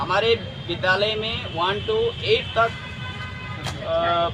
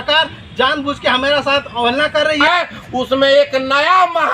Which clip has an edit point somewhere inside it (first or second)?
second